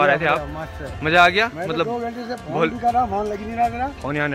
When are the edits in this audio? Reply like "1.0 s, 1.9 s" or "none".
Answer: none